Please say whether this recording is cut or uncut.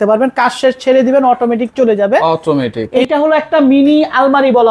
cut